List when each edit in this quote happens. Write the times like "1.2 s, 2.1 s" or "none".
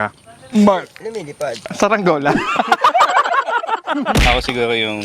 none